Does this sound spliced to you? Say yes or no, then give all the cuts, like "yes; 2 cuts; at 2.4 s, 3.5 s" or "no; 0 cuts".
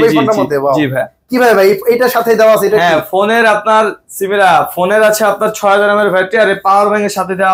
no; 0 cuts